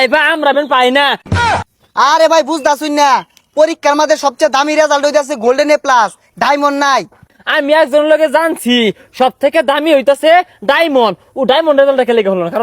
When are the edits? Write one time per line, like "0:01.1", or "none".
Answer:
0:01.4
0:07.3